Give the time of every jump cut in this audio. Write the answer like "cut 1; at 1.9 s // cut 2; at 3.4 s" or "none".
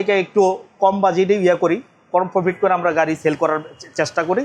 none